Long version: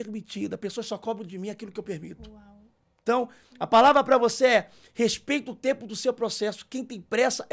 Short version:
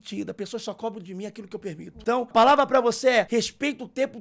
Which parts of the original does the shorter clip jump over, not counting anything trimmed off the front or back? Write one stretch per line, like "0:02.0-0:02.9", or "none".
0:02.6-0:03.7
0:04.6-0:04.9